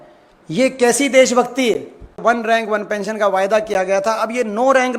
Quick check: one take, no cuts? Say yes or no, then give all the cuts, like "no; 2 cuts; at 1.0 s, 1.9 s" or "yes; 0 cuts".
no; 1 cut; at 2.2 s